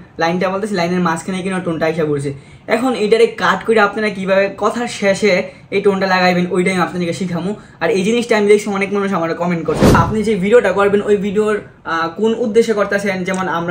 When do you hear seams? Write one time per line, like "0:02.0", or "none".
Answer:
0:10.0